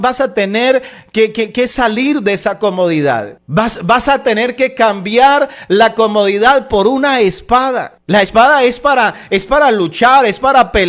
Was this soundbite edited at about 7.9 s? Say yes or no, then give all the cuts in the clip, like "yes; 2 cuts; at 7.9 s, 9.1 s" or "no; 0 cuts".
yes; 2 cuts; at 3.4 s, 7.9 s